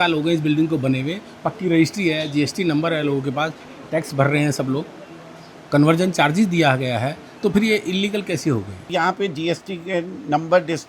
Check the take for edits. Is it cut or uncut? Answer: cut